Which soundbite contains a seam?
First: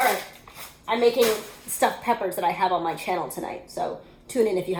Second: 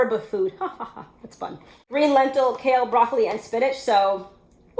second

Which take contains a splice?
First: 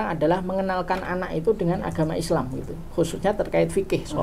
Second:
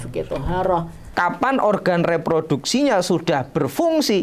second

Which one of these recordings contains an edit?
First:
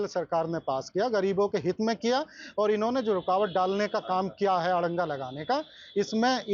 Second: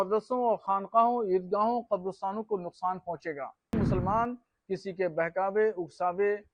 second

